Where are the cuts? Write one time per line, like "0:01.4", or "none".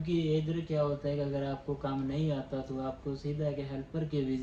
none

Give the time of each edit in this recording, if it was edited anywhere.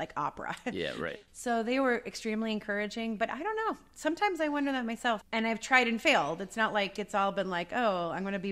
0:01.1
0:05.2

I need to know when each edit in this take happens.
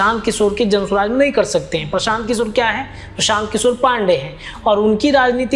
none

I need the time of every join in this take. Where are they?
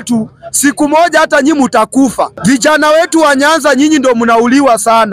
0:02.3

